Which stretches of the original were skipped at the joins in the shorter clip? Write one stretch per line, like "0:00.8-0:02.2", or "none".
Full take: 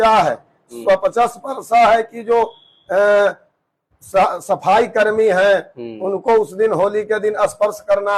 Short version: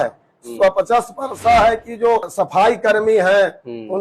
0:02.5-0:04.4